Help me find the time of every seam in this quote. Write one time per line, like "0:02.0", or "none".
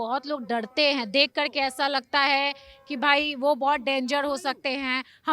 none